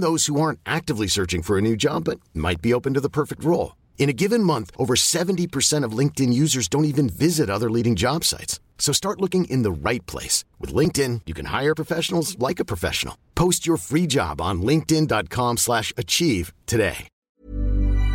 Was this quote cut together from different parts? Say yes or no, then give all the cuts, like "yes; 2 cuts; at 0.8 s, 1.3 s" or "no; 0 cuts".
yes; 1 cut; at 17.1 s